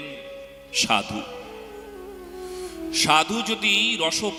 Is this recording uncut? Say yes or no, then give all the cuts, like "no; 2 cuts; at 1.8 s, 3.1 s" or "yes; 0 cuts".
yes; 0 cuts